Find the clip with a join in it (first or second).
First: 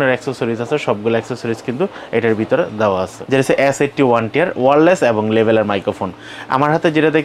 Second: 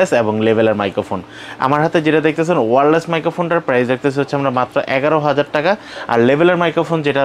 first